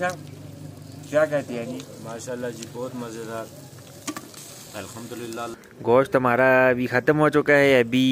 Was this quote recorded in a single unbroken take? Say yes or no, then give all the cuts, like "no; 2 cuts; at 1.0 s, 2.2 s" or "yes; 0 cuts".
no; 1 cut; at 5.6 s